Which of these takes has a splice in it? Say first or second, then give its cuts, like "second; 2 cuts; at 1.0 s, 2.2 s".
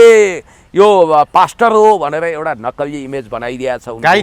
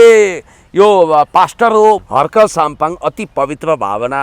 second; 1 cut; at 2.0 s